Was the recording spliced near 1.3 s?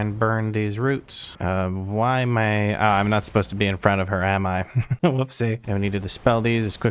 yes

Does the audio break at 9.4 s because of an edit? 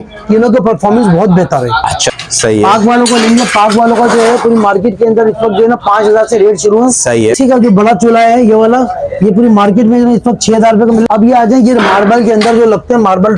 no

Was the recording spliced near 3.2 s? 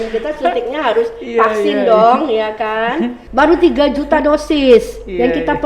yes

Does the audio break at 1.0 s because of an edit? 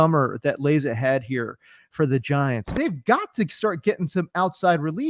no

